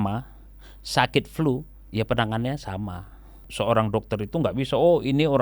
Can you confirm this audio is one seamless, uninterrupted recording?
no; 1 cut; at 3.5 s

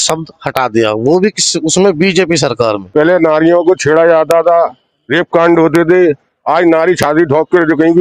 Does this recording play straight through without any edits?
no; 1 cut; at 2.8 s

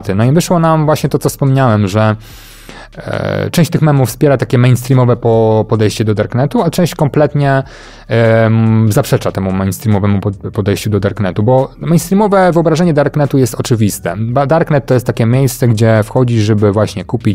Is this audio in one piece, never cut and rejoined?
yes; 0 cuts

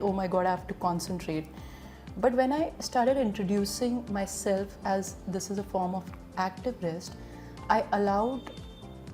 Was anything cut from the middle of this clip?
no; 0 cuts

